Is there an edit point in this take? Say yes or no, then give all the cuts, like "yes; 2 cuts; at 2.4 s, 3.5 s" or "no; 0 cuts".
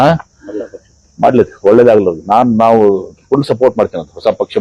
no; 0 cuts